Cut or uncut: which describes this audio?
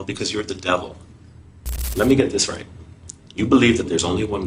cut